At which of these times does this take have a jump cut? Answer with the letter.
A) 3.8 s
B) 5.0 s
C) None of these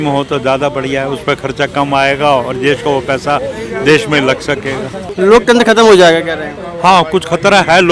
B